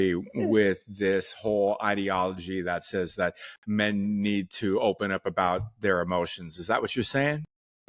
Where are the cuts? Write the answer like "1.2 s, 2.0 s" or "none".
none